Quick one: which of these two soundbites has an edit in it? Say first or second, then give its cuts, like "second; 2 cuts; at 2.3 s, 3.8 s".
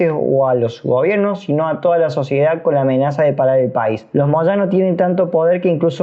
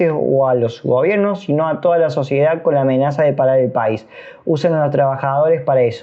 first; 1 cut; at 4.0 s